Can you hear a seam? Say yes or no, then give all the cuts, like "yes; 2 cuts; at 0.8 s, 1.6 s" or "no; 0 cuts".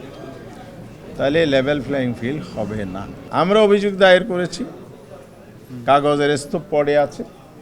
yes; 1 cut; at 3.2 s